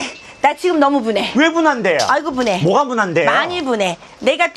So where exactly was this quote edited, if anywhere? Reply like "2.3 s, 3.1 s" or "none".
none